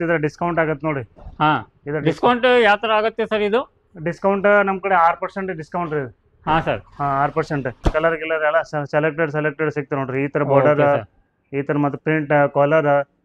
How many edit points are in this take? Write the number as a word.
one